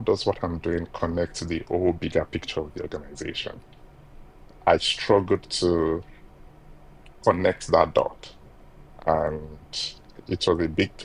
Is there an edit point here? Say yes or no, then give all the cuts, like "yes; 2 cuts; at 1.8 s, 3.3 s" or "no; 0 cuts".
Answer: no; 0 cuts